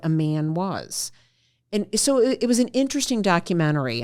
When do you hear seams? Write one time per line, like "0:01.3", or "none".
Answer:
none